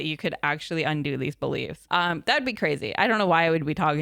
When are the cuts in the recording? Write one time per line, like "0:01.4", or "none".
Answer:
0:01.8

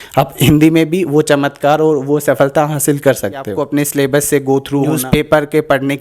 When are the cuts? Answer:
0:03.6
0:05.0

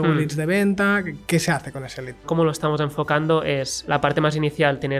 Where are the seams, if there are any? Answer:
0:02.3
0:03.8

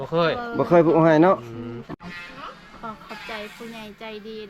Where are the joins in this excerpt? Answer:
0:01.9

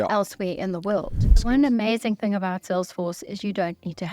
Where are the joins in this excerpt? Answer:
0:01.3

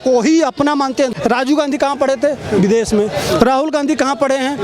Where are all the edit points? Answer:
0:01.1

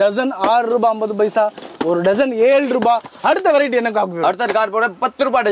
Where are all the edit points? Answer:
none

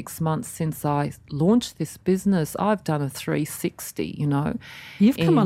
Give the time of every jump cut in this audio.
none

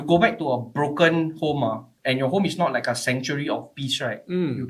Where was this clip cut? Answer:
none

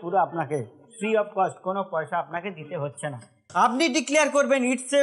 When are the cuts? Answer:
0:03.5

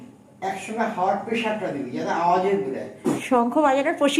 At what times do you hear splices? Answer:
0:03.2

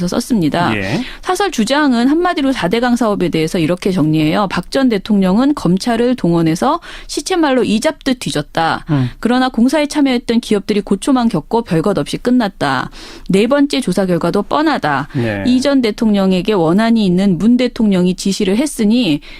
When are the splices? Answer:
none

